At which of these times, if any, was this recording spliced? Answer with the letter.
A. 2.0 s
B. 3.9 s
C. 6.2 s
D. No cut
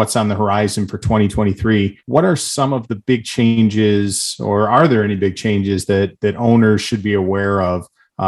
A